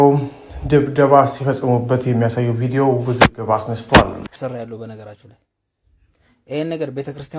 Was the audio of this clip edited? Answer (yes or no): yes